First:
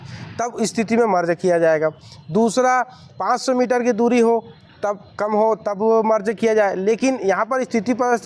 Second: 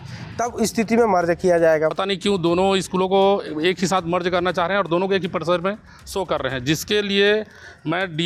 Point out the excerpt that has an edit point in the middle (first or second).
second